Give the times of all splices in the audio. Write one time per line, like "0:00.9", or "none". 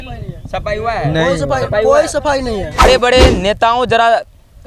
0:02.9